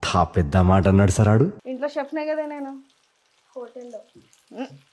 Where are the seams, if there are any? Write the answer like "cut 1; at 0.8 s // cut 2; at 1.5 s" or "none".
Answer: none